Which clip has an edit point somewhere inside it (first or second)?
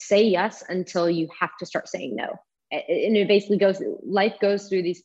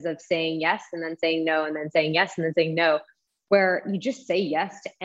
first